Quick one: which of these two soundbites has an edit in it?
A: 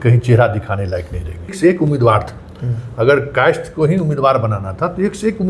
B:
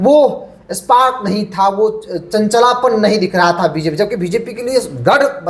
A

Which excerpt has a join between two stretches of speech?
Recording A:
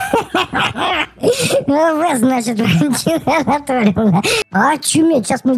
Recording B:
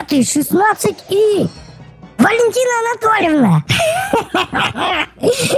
A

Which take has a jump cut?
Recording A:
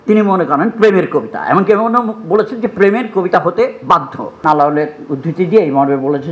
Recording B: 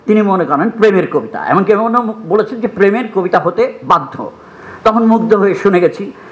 A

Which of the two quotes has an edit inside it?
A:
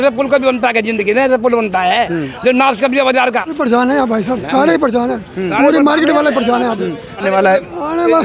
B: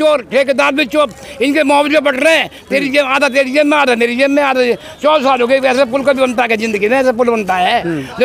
A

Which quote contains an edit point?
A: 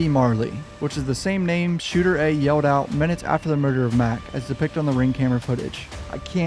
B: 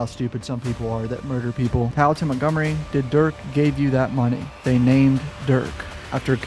B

